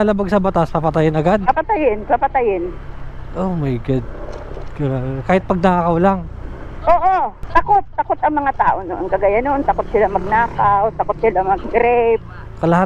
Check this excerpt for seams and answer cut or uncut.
uncut